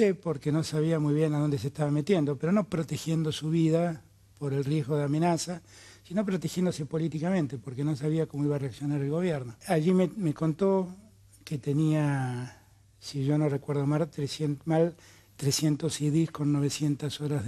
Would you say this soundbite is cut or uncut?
cut